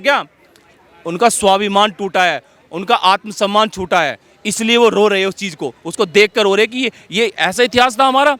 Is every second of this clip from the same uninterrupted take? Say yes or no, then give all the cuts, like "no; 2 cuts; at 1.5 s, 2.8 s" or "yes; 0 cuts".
yes; 0 cuts